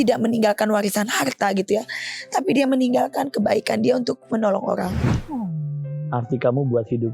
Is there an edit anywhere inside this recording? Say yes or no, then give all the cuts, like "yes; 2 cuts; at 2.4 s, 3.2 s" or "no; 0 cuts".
yes; 1 cut; at 5.1 s